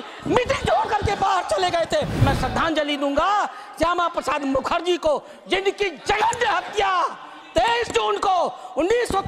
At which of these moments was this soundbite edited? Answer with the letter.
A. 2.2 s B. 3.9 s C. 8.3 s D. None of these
A